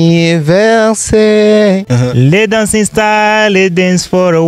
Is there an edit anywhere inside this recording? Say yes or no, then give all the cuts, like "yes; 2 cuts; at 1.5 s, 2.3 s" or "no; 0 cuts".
yes; 1 cut; at 1.9 s